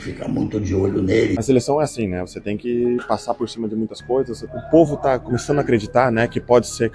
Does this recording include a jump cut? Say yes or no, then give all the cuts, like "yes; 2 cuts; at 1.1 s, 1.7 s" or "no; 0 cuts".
yes; 2 cuts; at 1.4 s, 4.5 s